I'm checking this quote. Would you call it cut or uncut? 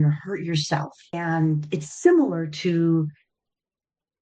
cut